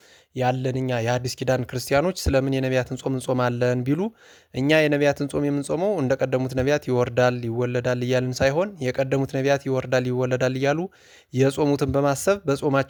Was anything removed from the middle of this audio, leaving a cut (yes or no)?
no